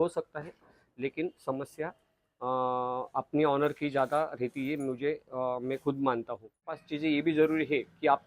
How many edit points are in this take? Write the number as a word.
one